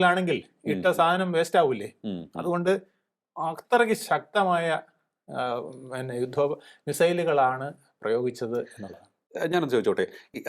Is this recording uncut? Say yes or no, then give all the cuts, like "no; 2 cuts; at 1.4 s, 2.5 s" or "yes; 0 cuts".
yes; 0 cuts